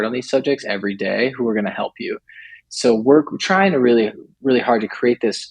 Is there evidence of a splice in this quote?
yes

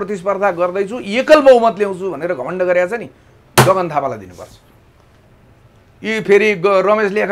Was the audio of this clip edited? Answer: no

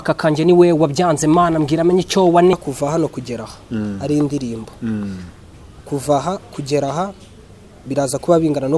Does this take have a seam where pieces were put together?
yes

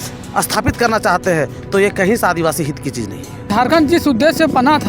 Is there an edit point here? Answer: yes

